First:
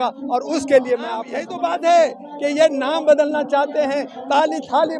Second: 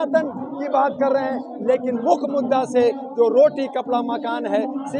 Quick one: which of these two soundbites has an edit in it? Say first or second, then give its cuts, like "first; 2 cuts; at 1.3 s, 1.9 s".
first; 1 cut; at 1.5 s